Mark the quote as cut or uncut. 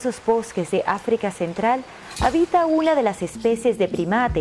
cut